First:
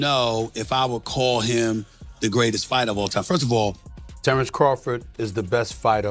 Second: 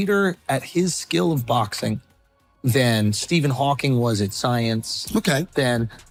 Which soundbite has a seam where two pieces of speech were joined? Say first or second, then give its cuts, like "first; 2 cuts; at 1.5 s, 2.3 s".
first; 1 cut; at 3.9 s